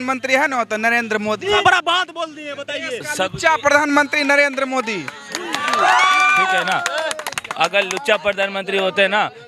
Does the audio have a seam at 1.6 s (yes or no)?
yes